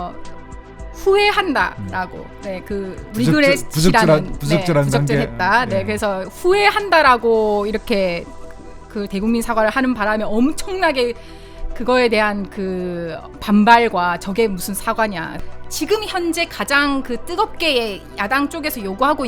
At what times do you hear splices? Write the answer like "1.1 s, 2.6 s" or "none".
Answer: 15.4 s